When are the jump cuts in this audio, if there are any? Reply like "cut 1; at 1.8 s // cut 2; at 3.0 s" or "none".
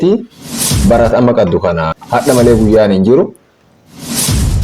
cut 1; at 1.9 s